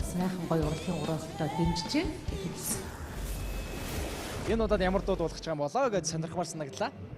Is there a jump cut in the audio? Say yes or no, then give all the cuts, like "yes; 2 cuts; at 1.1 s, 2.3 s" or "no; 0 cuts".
yes; 1 cut; at 6.0 s